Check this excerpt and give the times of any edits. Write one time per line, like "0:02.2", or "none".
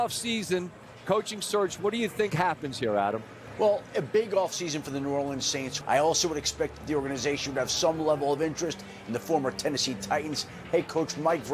0:03.4
0:05.7